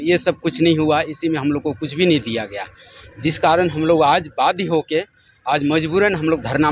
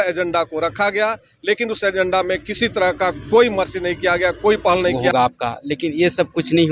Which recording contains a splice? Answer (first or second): second